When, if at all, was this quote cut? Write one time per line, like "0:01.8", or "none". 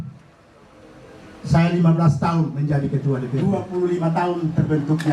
0:03.4